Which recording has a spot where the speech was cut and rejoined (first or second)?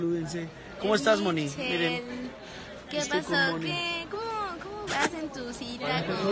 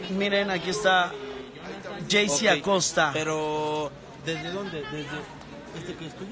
first